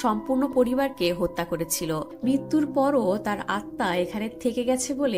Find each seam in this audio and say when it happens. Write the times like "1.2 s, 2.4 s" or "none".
2.1 s